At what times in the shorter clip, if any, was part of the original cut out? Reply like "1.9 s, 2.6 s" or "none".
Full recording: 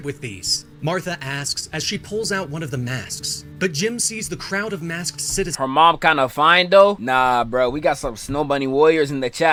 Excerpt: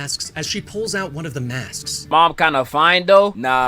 2.1 s